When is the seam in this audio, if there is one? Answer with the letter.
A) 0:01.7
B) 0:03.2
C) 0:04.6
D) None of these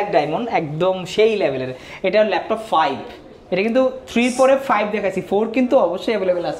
D